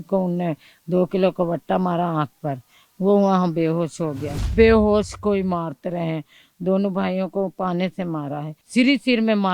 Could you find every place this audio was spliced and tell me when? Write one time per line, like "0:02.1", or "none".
0:04.5
0:08.6